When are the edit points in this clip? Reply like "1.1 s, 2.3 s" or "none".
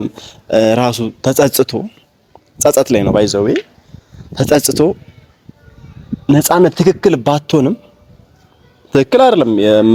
none